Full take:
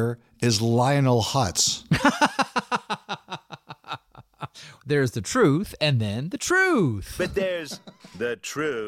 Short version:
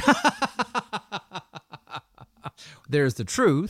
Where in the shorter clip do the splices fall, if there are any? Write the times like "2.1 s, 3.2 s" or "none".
none

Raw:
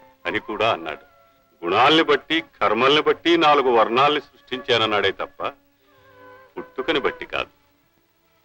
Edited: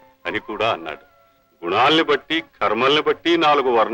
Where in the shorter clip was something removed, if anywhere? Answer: none

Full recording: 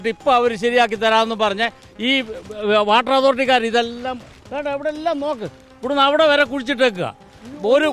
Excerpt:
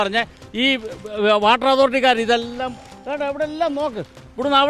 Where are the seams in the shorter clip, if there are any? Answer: none

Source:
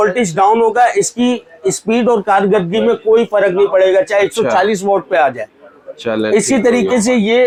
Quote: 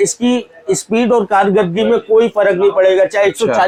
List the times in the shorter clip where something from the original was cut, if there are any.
none

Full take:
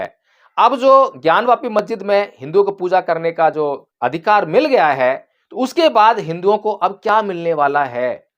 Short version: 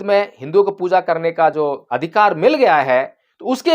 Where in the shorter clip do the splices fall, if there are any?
1.8 s

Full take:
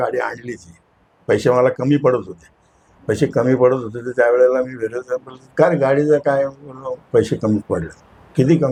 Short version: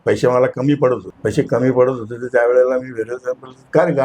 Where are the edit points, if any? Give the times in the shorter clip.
1.1 s

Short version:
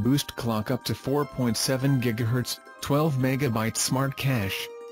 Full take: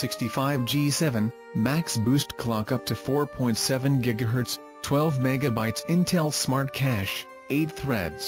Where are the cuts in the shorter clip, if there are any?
3.8 s

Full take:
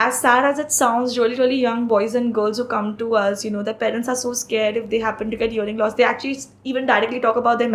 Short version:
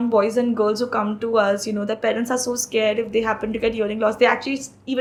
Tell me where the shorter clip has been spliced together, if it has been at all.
none

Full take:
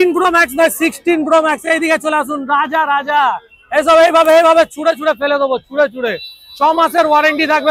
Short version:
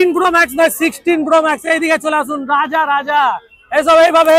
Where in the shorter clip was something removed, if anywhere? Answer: none

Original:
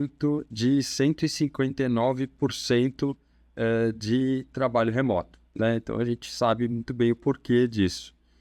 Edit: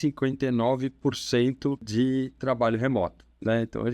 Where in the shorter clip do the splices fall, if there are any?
1.9 s

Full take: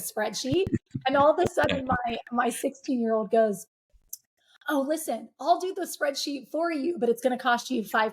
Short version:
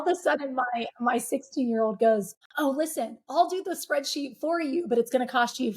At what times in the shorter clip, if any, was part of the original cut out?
2.4 s

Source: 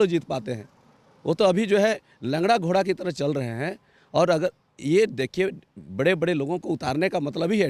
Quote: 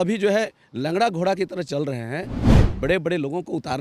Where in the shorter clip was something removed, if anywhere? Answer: 2.5 s

